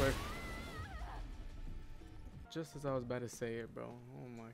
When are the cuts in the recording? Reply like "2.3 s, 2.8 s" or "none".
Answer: 2.5 s

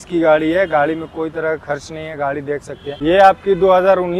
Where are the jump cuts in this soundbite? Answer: 3.0 s

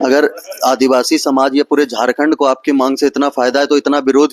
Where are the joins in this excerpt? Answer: none

